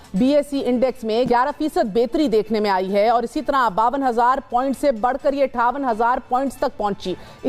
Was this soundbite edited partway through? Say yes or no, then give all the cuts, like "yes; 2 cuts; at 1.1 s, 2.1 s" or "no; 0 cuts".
yes; 1 cut; at 1.3 s